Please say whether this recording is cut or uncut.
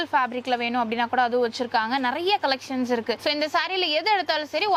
uncut